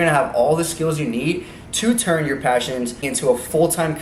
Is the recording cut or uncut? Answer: cut